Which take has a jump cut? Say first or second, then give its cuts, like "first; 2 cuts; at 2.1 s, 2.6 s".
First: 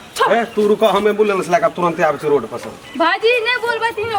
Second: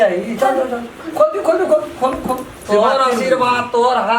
second; 1 cut; at 2.5 s